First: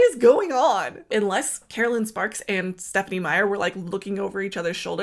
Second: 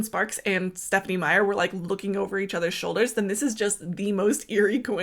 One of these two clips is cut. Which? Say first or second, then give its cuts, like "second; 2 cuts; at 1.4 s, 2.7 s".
first; 1 cut; at 1.1 s